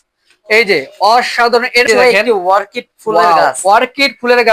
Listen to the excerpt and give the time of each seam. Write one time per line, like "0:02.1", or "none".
0:01.9